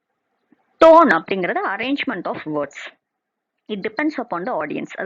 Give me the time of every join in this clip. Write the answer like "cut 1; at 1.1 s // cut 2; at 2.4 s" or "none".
cut 1; at 1.8 s